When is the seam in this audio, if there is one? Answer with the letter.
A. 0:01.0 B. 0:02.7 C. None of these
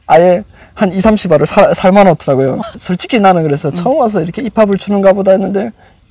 B